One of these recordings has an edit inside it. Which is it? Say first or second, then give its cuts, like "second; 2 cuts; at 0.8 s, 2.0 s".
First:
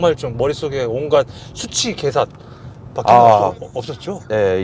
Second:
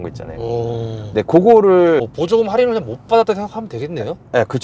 second; 1 cut; at 2.0 s